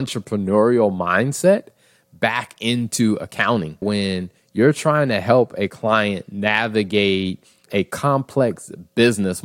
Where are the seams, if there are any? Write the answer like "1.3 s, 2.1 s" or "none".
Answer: 3.8 s, 7.7 s